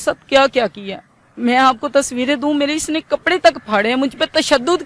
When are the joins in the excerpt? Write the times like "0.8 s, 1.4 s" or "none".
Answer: none